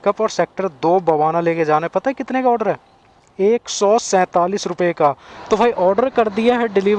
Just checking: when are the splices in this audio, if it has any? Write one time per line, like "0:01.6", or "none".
0:05.4